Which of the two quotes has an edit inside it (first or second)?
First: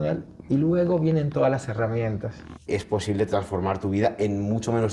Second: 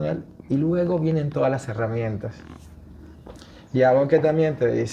first